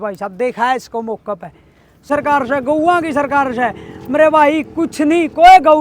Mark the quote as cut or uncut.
cut